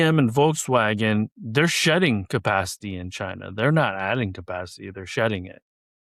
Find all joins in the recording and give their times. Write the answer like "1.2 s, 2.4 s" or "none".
none